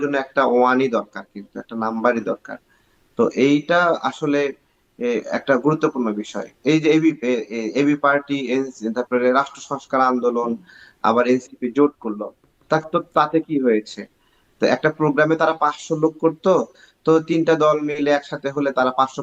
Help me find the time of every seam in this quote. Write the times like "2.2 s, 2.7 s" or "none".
none

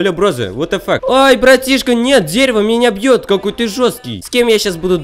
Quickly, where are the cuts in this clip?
1.0 s, 4.2 s

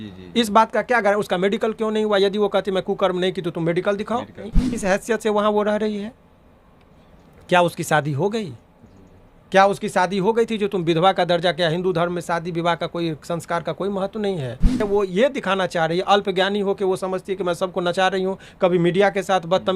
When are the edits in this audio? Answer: 4.6 s, 14.8 s

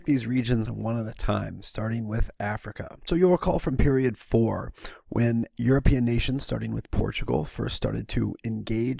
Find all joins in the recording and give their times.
none

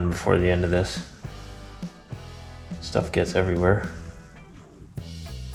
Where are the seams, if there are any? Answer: none

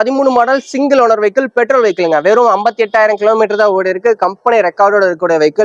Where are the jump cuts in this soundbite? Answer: none

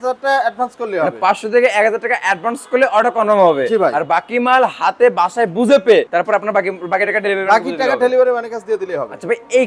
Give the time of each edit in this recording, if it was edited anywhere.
none

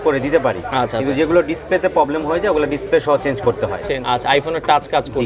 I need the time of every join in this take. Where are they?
3.8 s

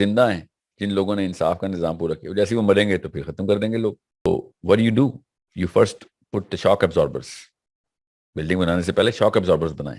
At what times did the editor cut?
4.3 s

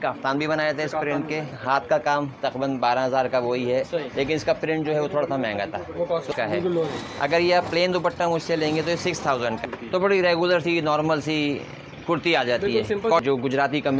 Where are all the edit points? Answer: 1.5 s, 6.3 s, 9.6 s, 13.2 s

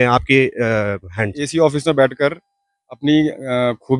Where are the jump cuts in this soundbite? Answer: 1.4 s

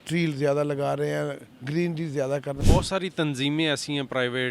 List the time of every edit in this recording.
2.6 s

